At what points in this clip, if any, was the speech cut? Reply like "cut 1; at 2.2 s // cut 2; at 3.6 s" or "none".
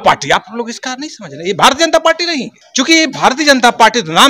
cut 1; at 2.6 s